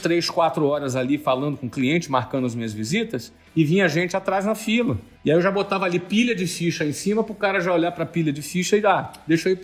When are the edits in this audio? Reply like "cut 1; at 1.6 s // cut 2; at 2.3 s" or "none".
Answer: none